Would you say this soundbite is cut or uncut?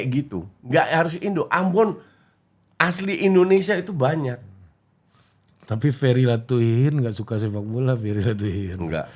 uncut